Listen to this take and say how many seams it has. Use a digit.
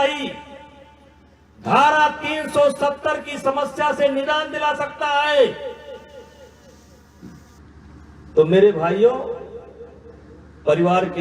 1